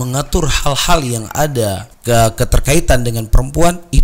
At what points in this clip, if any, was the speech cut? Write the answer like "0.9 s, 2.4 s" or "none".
1.9 s